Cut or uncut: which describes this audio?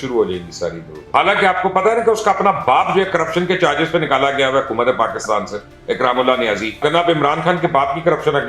cut